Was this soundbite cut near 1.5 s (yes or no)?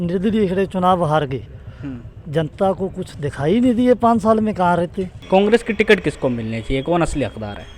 no